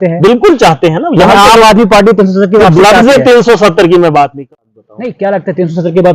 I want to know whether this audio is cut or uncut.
cut